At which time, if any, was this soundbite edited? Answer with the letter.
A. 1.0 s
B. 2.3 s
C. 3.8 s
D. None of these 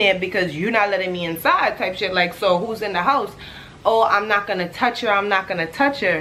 D